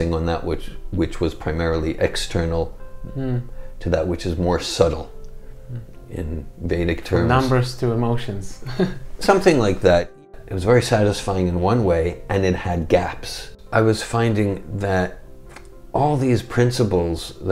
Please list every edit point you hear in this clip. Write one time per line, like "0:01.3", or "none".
0:10.2
0:13.5